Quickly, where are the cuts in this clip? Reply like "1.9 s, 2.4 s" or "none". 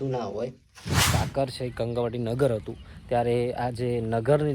1.0 s